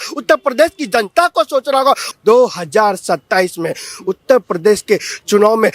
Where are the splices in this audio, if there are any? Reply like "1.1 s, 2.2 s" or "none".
2.1 s